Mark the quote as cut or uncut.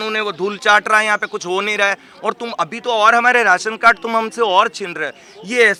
uncut